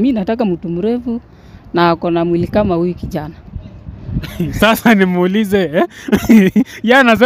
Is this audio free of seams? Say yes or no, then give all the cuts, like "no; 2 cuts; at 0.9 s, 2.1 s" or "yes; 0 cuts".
yes; 0 cuts